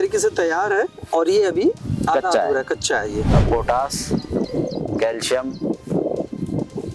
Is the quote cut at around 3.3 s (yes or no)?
yes